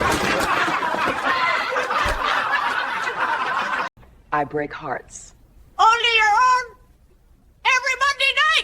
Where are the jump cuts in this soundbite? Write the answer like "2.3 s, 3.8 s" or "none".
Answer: 4.1 s